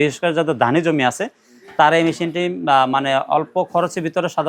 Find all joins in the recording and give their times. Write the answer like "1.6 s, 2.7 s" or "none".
none